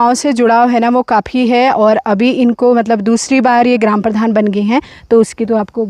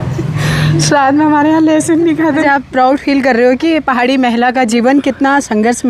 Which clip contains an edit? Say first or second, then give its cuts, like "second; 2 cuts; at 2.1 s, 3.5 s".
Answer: second; 1 cut; at 2.4 s